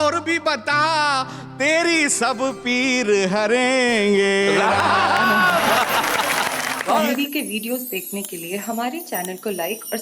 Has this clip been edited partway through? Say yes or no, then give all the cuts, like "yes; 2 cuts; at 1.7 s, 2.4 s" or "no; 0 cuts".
yes; 1 cut; at 7.0 s